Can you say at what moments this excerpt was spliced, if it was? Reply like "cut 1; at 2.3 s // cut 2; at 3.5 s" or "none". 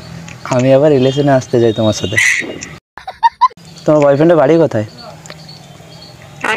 cut 1; at 3.2 s

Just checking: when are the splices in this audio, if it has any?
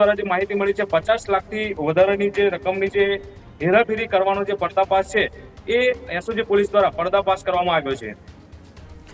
none

